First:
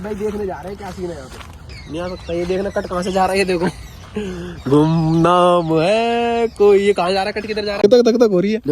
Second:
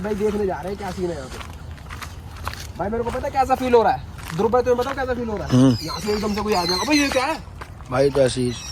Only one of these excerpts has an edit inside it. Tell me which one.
first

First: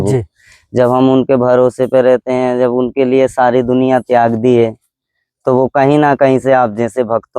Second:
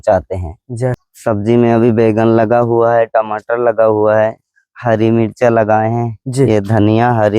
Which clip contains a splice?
second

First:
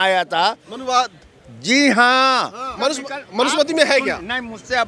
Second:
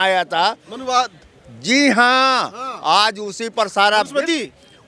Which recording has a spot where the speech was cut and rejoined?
first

